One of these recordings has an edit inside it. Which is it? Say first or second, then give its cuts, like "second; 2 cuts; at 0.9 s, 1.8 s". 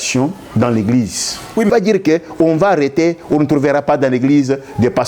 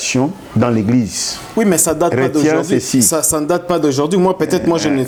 first; 1 cut; at 1.7 s